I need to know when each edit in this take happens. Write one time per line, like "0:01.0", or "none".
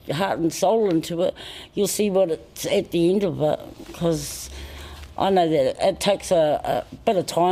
none